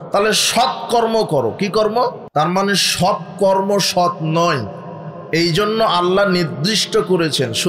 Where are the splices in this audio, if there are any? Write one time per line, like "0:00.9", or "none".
0:02.2